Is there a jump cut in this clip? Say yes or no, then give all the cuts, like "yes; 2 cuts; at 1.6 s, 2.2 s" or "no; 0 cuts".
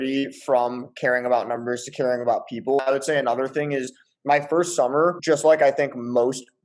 no; 0 cuts